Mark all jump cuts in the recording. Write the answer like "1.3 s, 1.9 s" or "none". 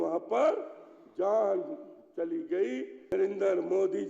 3.1 s